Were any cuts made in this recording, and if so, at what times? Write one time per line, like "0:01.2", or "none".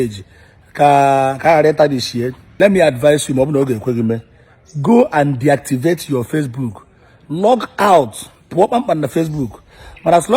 0:02.4